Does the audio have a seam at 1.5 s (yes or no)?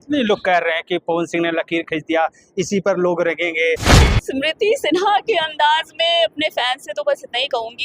no